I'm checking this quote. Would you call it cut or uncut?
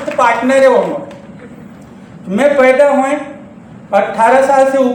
uncut